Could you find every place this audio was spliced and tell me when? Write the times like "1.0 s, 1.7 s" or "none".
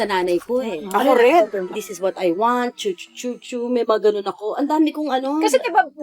1.6 s